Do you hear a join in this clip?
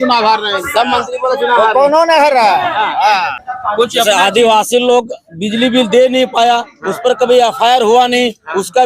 yes; 1 cut; at 3.4 s

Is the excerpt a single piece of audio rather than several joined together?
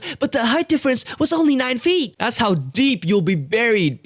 no; 1 cut; at 2.1 s

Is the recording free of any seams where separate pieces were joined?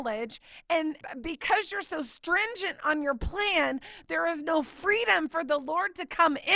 yes; 0 cuts

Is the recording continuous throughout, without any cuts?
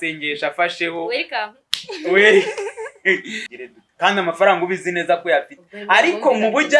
no; 1 cut; at 3.4 s

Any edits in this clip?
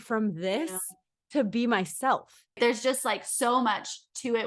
yes; 1 cut; at 2.5 s

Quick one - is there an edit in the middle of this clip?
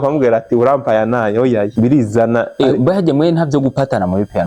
yes; 1 cut; at 1.7 s

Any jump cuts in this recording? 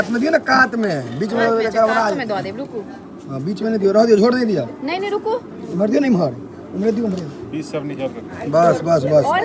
no; 0 cuts

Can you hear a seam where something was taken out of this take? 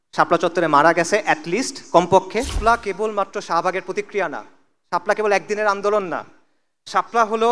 yes; 1 cut; at 2.6 s

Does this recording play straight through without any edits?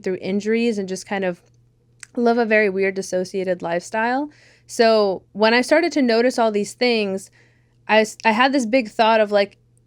yes; 0 cuts

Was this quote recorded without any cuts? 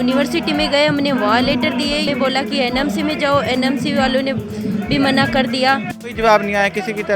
no; 2 cuts; at 2.1 s, 6.0 s

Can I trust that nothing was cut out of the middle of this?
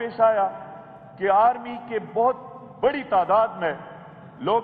yes; 0 cuts

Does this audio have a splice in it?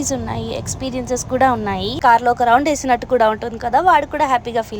yes; 1 cut; at 2.0 s

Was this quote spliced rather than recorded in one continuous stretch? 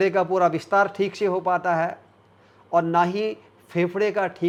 no; 0 cuts

